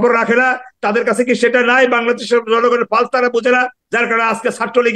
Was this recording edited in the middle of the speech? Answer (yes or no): yes